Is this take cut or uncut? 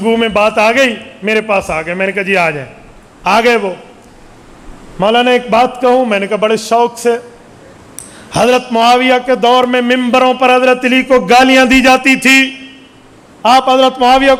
uncut